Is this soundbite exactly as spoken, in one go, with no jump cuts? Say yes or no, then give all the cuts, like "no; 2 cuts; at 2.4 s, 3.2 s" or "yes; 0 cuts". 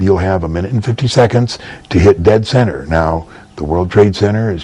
yes; 0 cuts